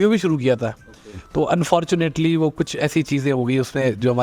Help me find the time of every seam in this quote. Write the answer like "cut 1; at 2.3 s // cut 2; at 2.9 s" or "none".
none